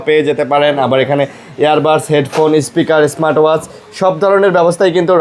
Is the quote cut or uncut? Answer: uncut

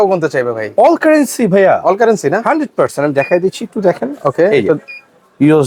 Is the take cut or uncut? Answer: uncut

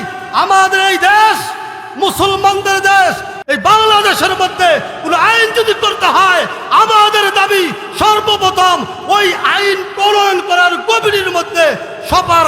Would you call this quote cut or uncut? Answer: cut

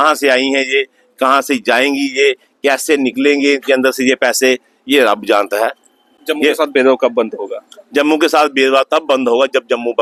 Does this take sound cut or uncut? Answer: uncut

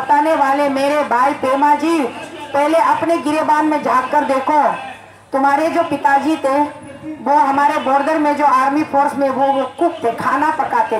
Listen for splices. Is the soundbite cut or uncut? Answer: uncut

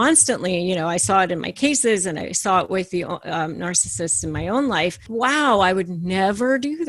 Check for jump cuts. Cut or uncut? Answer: cut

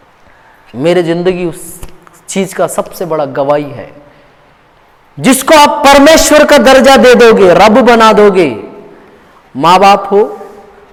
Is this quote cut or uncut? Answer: uncut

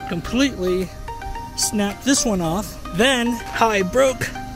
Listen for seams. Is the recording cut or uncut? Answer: cut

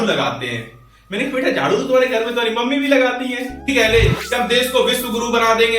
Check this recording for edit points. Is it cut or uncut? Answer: cut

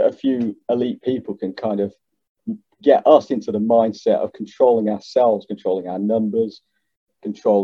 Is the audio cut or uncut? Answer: uncut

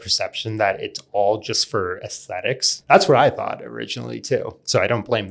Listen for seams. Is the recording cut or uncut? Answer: cut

